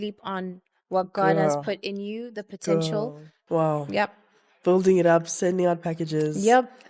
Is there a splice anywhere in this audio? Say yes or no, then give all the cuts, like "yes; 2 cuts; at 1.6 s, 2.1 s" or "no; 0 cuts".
yes; 1 cut; at 3.3 s